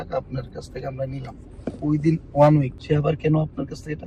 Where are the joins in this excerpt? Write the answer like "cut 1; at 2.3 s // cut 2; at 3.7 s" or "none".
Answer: cut 1; at 2.8 s

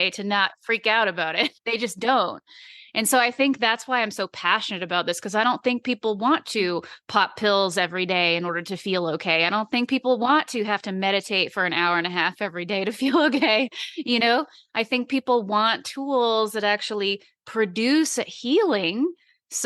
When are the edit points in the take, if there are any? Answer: cut 1; at 1.9 s

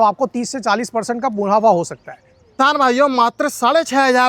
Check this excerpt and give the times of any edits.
cut 1; at 2.4 s

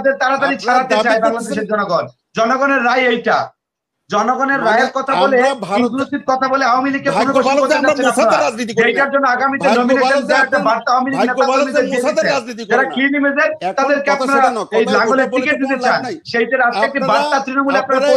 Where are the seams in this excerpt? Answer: none

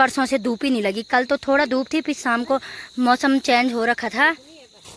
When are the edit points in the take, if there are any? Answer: none

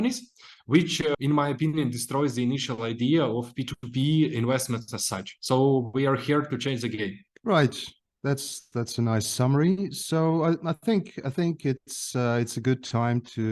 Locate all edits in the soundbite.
none

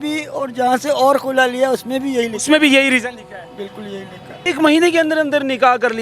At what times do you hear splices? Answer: cut 1; at 4.3 s

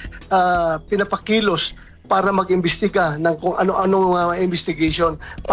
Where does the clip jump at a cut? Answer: cut 1; at 1.2 s

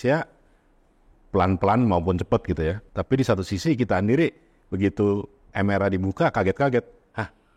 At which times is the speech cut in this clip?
cut 1; at 2.8 s

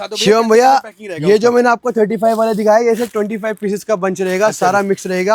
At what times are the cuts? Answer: none

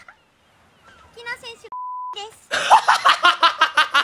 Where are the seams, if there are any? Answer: none

